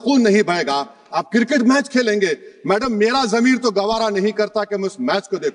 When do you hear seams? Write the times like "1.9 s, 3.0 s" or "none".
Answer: none